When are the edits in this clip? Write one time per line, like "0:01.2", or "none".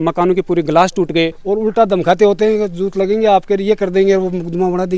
0:01.4